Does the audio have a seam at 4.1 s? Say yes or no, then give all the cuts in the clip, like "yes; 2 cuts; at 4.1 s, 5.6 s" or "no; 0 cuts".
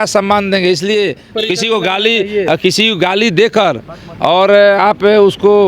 no; 1 cut; at 1.3 s